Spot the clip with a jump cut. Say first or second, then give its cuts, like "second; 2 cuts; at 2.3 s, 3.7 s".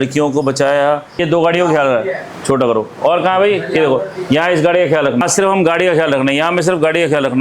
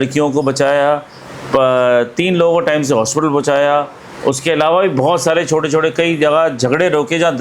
first; 2 cuts; at 1.2 s, 5.2 s